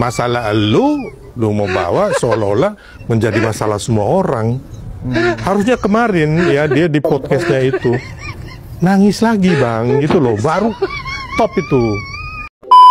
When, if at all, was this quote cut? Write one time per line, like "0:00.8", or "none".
0:11.9